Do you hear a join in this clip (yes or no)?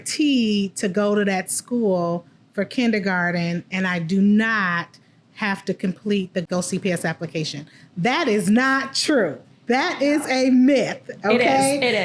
yes